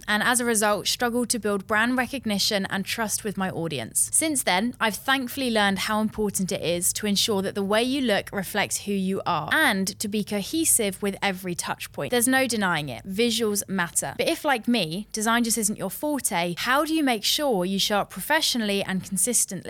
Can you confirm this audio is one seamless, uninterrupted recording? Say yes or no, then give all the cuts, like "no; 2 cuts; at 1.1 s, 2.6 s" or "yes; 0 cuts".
yes; 0 cuts